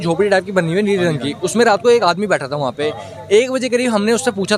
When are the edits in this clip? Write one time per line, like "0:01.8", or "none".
none